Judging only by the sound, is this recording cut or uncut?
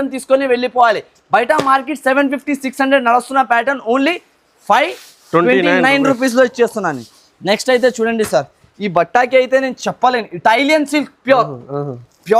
uncut